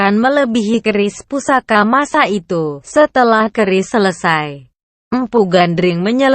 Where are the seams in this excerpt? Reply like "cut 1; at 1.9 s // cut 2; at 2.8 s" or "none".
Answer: cut 1; at 1.9 s